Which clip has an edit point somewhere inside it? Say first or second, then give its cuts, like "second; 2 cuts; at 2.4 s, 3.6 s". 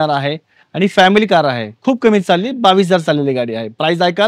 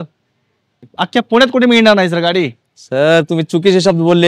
second; 1 cut; at 0.9 s